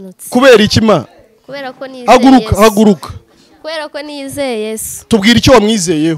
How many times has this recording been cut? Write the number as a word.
zero